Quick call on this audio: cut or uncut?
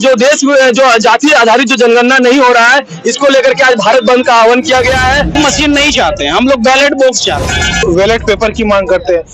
cut